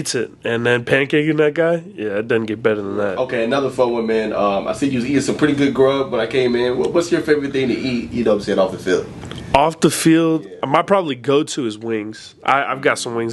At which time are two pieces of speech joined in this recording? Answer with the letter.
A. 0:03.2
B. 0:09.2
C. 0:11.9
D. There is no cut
A